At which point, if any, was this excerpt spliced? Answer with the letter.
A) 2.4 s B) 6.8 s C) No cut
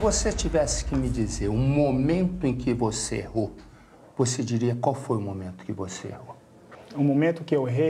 B